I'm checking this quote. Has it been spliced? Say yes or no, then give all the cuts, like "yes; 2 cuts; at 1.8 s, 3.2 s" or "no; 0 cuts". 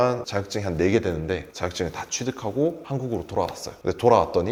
no; 0 cuts